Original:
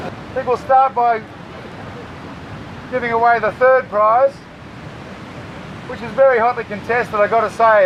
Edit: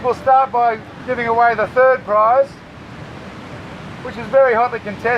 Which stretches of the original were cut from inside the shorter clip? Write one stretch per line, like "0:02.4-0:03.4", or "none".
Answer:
0:01.3-0:02.8